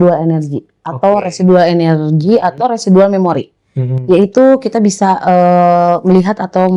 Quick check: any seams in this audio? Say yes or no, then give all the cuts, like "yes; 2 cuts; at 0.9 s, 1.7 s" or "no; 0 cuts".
no; 0 cuts